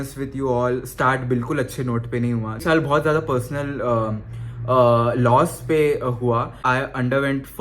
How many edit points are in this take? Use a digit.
2